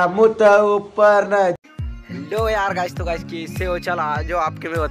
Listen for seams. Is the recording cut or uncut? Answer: cut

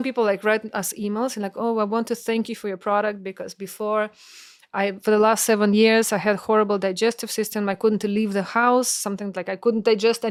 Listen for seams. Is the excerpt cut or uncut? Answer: uncut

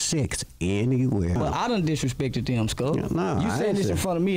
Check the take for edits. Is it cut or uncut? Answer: cut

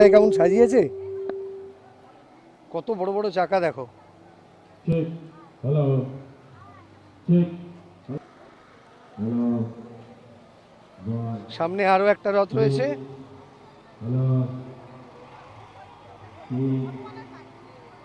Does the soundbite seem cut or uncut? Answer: uncut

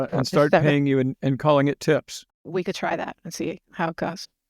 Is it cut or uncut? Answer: cut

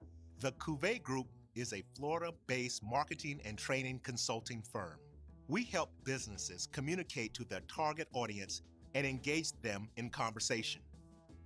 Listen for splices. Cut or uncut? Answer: uncut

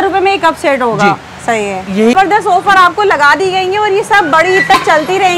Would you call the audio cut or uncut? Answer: cut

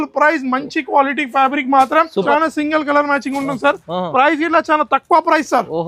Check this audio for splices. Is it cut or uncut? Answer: cut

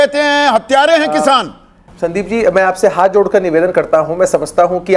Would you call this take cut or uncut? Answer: cut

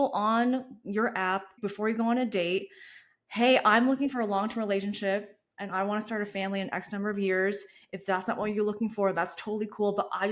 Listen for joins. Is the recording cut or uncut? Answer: cut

